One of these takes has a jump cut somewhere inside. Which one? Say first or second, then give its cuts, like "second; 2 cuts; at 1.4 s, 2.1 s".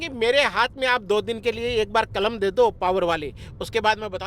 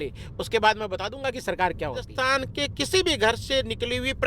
second; 1 cut; at 2.1 s